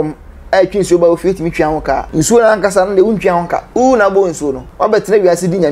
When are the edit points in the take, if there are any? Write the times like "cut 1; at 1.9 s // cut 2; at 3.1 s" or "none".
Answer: cut 1; at 2.1 s // cut 2; at 3.7 s // cut 3; at 4.6 s